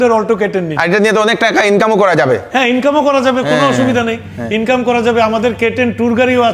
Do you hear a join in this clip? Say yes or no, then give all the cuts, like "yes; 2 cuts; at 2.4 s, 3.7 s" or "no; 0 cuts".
no; 0 cuts